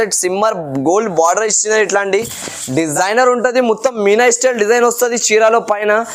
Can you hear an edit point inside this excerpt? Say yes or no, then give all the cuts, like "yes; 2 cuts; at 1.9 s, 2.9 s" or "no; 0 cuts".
yes; 1 cut; at 2.9 s